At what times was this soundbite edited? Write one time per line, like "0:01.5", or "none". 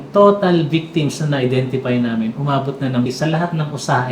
0:03.1